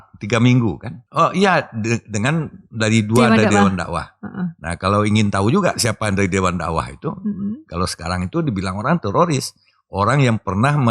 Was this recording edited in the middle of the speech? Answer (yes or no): yes